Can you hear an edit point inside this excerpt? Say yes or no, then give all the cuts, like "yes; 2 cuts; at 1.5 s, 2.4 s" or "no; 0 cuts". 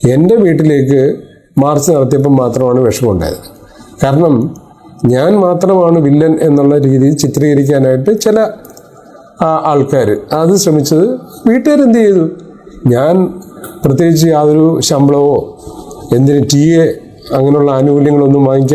no; 0 cuts